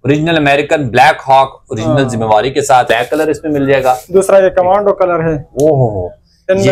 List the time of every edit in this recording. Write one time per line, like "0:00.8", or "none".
0:02.9

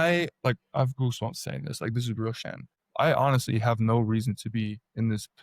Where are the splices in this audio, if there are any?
0:02.4

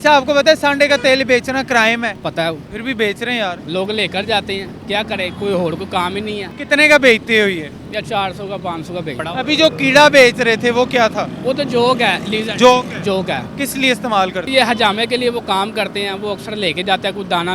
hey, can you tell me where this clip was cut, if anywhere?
0:02.3
0:03.6
0:06.5
0:09.2
0:13.5
0:14.5

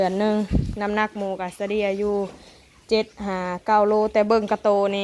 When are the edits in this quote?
none

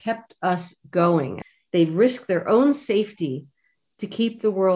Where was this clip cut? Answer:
0:01.4

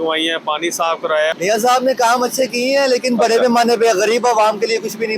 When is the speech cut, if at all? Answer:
0:01.3

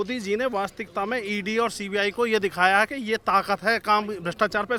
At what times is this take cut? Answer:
none

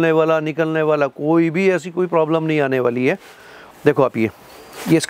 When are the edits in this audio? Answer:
none

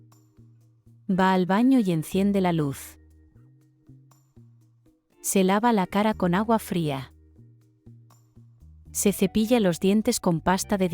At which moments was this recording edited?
0:01.0

